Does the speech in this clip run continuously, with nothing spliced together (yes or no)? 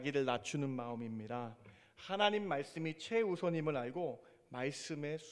yes